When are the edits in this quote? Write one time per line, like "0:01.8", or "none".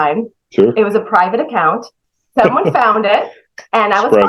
0:01.9